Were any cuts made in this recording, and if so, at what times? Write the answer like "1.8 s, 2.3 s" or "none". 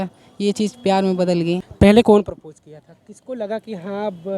1.7 s, 3.1 s